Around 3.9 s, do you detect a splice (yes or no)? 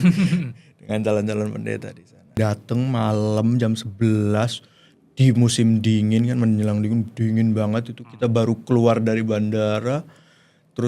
no